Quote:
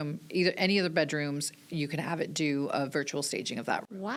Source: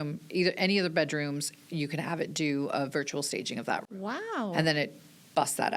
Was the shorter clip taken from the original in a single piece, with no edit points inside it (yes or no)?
yes